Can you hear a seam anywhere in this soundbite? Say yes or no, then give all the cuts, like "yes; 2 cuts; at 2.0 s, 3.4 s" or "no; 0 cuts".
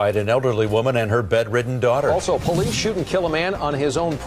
yes; 1 cut; at 2.3 s